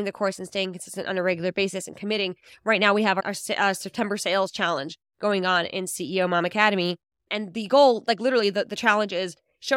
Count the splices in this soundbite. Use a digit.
1